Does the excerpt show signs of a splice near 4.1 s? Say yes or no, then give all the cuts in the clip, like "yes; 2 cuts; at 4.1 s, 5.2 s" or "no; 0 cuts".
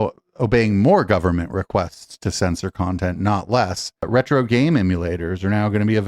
yes; 1 cut; at 4.1 s